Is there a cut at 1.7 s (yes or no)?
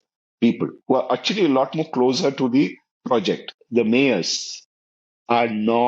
no